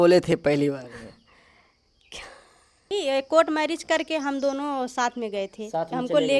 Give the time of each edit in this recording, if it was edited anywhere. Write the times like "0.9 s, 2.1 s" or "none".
2.9 s